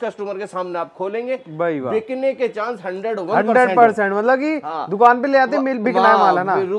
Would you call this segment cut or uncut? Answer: uncut